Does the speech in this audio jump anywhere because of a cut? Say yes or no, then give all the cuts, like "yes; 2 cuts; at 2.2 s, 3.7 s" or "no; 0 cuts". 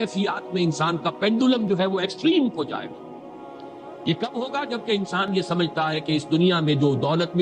no; 0 cuts